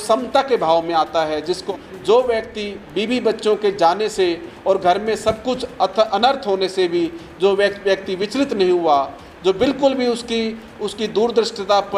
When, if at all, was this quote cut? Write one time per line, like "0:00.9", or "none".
0:01.7